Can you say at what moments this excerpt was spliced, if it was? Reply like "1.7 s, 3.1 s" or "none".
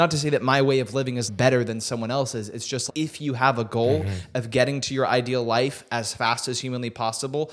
1.3 s, 2.8 s